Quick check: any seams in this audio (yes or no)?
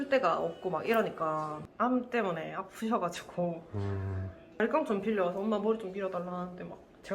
yes